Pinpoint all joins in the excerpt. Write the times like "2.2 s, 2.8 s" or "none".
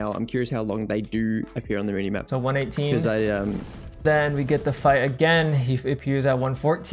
2.2 s, 4.0 s